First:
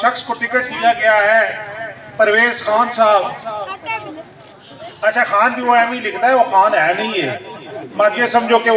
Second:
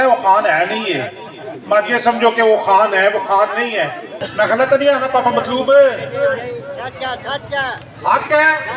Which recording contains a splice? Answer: second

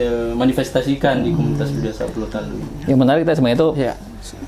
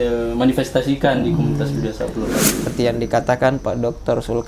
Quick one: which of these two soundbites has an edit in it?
second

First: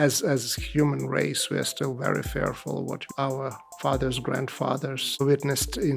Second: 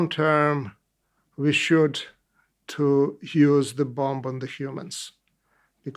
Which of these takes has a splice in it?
first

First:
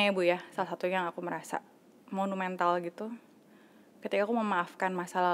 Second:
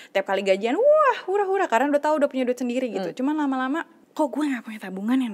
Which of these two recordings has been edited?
second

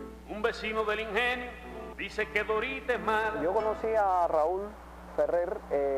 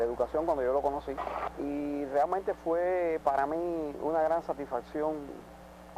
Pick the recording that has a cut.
second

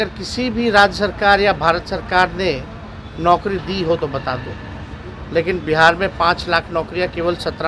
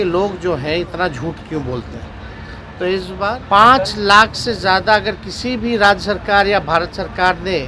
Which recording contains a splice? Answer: second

